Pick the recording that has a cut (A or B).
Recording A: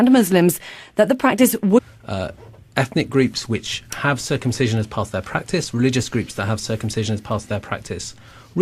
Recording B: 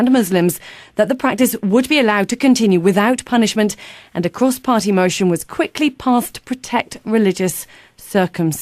B